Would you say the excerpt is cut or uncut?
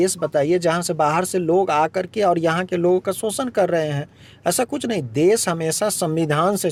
uncut